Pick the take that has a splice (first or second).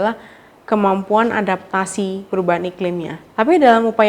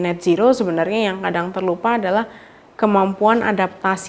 first